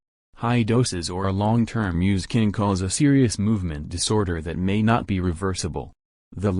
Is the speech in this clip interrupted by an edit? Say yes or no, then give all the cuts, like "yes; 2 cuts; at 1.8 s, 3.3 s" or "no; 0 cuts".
yes; 1 cut; at 2.1 s